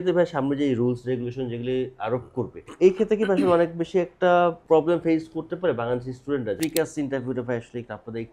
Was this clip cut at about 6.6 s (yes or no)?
yes